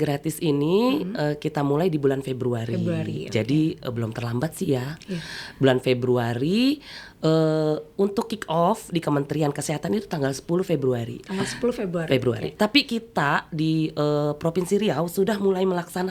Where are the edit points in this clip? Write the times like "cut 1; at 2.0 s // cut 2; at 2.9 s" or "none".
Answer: none